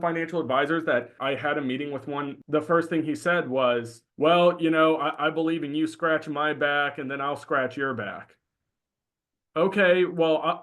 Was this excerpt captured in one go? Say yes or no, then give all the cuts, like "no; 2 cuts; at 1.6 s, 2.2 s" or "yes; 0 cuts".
no; 3 cuts; at 1.1 s, 2.4 s, 4.0 s